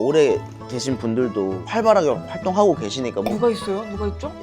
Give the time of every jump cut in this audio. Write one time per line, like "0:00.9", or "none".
0:01.6